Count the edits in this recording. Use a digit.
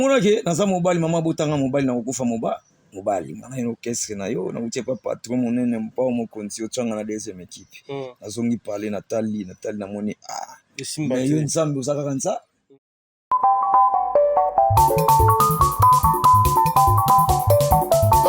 1